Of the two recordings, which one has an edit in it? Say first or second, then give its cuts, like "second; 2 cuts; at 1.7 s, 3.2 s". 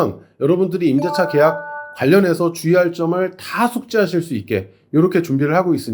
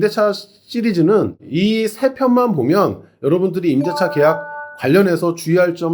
second; 1 cut; at 1.4 s